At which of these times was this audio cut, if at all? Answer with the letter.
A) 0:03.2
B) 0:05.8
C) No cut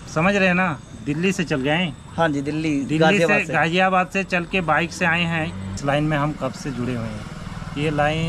B